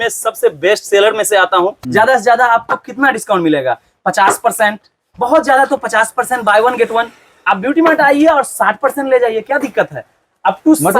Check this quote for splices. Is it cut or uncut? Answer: cut